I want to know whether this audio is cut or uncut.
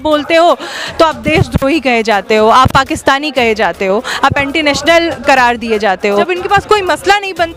cut